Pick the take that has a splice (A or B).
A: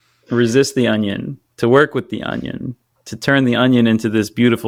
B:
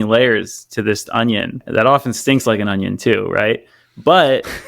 B